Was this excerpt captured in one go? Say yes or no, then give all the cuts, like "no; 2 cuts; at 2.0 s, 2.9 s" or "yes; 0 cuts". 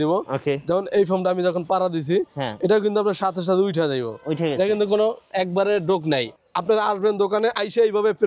no; 1 cut; at 6.4 s